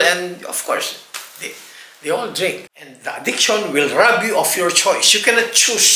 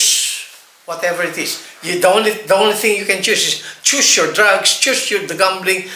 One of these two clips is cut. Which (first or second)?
first